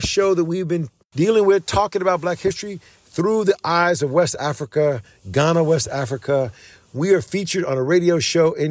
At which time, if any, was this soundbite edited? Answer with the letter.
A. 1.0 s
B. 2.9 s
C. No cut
A